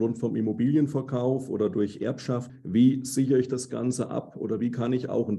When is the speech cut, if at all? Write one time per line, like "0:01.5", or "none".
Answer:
0:02.5